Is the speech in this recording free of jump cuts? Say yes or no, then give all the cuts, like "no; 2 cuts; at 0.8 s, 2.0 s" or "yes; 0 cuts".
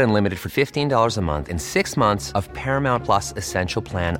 yes; 0 cuts